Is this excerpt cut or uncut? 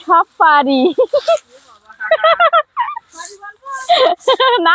uncut